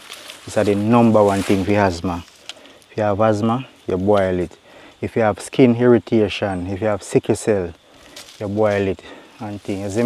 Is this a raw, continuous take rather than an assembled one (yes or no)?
yes